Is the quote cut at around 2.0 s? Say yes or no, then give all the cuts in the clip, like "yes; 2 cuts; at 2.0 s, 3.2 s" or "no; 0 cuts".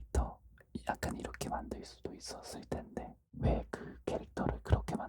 no; 1 cut; at 3.2 s